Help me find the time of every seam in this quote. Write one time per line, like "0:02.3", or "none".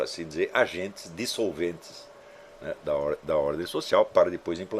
none